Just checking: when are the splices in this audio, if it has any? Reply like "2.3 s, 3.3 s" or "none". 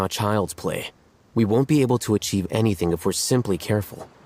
none